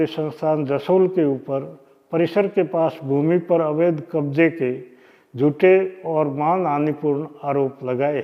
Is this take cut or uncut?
uncut